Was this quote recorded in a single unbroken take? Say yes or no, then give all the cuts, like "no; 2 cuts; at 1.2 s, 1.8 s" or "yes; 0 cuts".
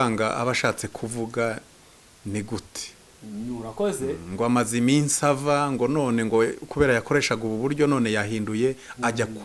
yes; 0 cuts